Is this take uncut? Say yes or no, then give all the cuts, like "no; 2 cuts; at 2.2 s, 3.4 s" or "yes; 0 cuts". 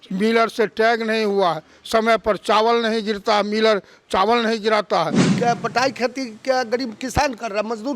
no; 1 cut; at 5.2 s